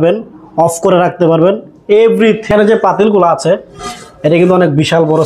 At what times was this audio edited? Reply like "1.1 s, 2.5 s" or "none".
2.5 s